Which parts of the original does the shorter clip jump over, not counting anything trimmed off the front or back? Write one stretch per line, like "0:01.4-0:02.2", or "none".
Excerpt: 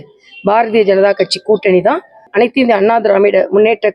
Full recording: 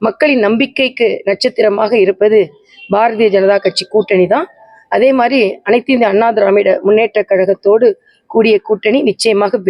0:04.7-0:05.6